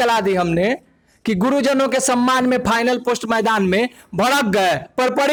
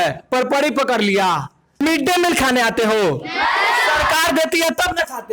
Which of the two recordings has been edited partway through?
second; 1 cut; at 1.8 s

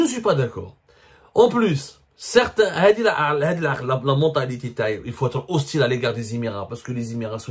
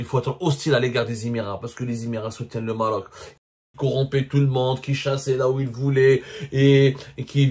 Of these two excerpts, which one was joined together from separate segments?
second; 1 cut; at 3.6 s

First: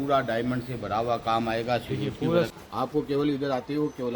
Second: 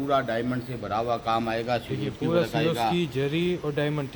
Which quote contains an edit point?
first; 1 cut; at 2.5 s

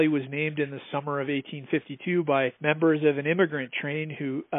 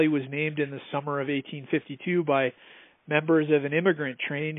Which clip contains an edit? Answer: first; 1 cut; at 2.6 s

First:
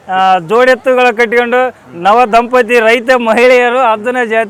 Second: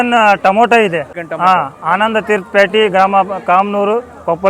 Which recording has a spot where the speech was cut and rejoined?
second; 1 cut; at 1.2 s

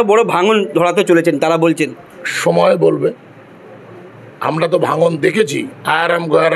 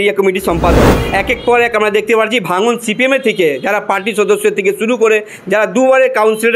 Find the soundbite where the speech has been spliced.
second; 1 cut; at 1.0 s

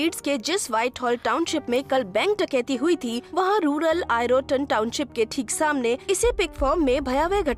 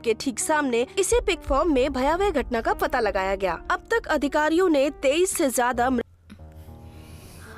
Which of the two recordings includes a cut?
second; 1 cut; at 6.0 s

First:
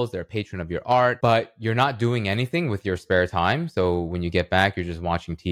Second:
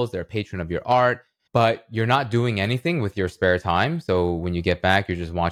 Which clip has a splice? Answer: first; 1 cut; at 1.2 s

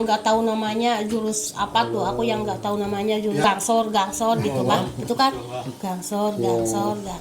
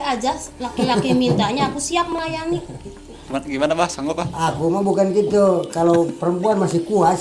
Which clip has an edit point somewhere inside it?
first; 1 cut; at 3.4 s

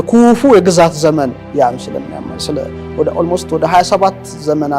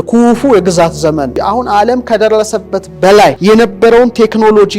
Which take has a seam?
second; 2 cuts; at 1.3 s, 3.4 s

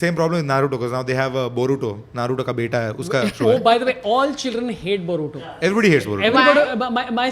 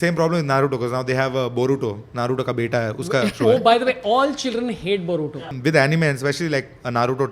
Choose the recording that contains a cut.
second; 1 cut; at 5.5 s

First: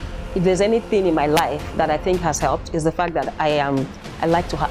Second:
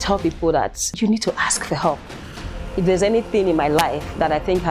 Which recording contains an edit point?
second; 1 cut; at 1.0 s

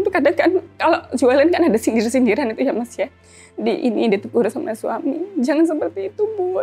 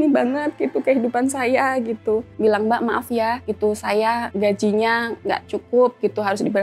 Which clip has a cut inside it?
second; 1 cut; at 2.3 s

